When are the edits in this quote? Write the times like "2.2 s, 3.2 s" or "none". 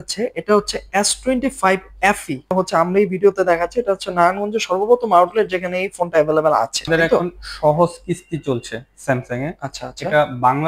2.5 s, 7.2 s